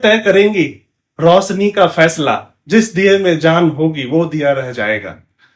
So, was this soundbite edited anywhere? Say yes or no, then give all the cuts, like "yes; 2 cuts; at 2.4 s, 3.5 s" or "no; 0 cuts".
no; 0 cuts